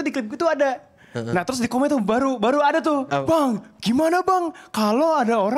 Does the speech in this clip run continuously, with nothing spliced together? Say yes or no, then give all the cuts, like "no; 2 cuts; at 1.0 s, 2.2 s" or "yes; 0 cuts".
no; 1 cut; at 3.1 s